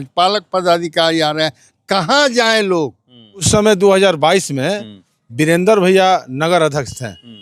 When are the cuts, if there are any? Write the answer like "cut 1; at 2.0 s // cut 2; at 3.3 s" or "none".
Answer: cut 1; at 3.5 s